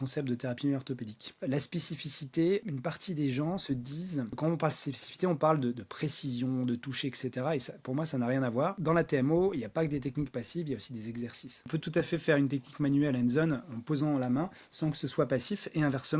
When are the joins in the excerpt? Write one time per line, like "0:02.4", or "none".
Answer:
0:01.2
0:02.6
0:04.4
0:08.8
0:11.7